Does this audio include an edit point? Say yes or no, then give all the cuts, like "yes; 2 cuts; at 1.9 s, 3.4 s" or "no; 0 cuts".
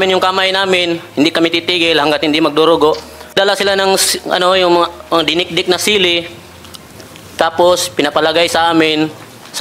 yes; 1 cut; at 3.3 s